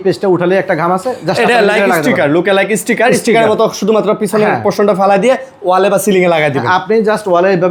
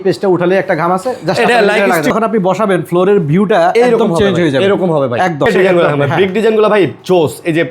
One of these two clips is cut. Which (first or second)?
second